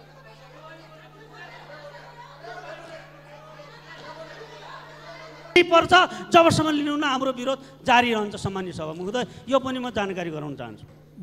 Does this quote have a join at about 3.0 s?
no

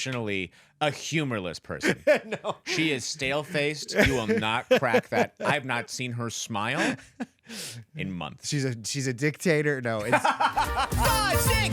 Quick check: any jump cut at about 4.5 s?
no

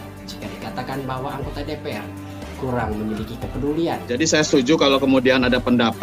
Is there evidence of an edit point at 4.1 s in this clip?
yes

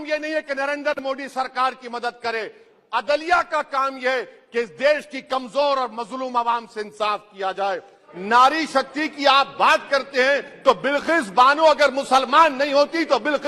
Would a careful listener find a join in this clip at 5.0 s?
no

